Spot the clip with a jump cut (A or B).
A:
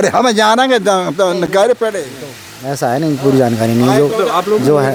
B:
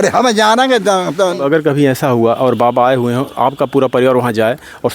B